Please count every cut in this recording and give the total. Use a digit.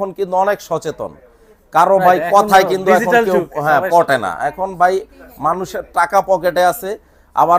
0